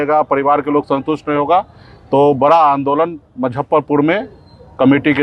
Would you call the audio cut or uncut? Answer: uncut